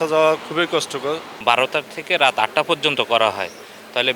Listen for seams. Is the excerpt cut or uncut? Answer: cut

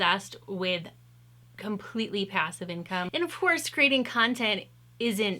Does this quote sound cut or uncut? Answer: cut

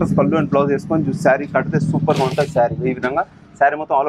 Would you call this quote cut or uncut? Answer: uncut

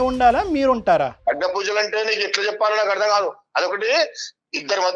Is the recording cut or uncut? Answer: cut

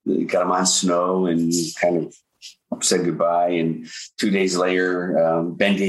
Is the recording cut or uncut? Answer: uncut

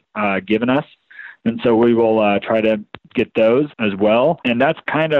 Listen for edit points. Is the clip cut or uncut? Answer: cut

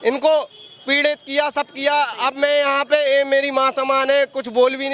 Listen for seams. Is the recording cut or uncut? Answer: uncut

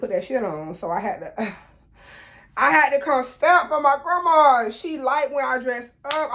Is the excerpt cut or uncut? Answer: uncut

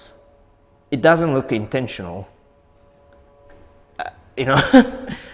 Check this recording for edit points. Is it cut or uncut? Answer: uncut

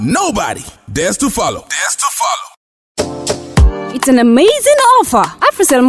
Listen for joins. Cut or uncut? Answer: cut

